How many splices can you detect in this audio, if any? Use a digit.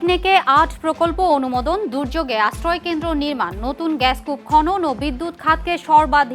0